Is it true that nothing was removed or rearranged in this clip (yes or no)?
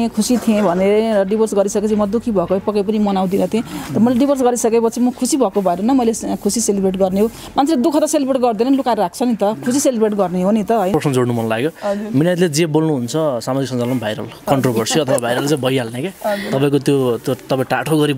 no